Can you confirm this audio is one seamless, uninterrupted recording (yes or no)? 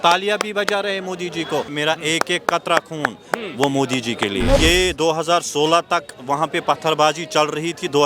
no